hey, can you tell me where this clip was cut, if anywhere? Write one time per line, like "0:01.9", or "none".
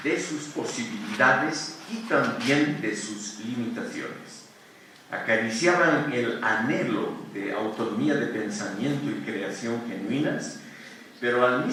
none